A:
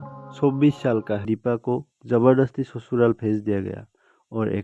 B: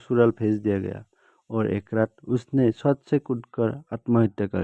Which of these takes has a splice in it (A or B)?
A